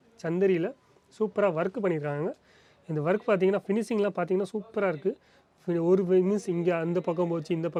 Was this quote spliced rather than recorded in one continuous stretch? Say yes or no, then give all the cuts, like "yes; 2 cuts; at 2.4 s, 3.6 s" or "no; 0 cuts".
no; 0 cuts